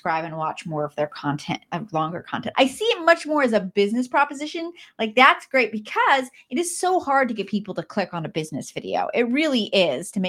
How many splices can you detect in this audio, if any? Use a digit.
1